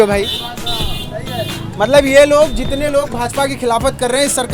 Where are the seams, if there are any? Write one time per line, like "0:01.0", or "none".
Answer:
none